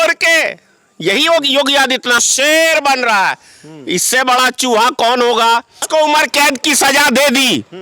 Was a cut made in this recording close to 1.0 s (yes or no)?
no